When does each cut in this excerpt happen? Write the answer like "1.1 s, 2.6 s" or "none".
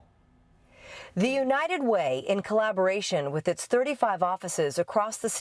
4.0 s

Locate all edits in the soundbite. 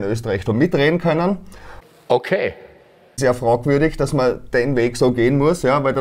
1.7 s, 3.1 s

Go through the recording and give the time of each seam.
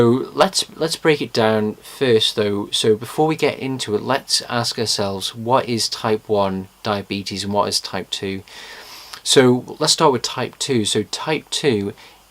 10.9 s

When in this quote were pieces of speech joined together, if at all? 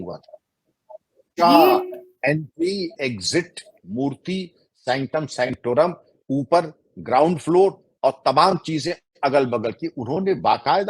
1.3 s

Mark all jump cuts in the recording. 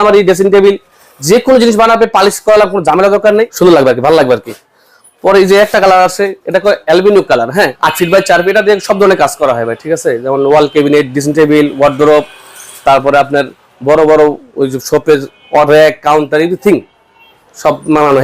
3.5 s, 7.7 s

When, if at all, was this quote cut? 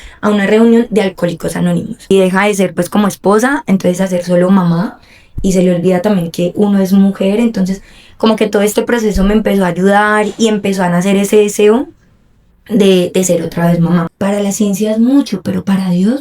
2.1 s, 14.1 s

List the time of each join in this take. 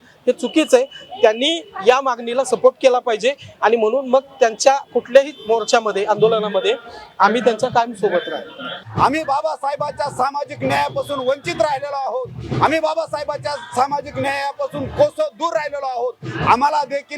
8.7 s

